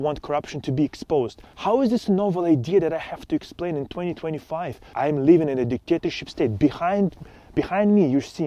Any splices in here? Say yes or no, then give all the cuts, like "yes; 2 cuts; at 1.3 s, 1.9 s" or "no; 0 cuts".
yes; 2 cuts; at 1.5 s, 4.9 s